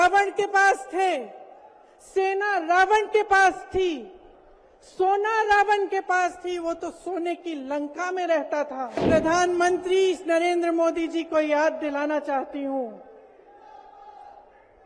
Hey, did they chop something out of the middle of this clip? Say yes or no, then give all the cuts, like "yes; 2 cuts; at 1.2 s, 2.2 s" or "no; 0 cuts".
yes; 1 cut; at 9.0 s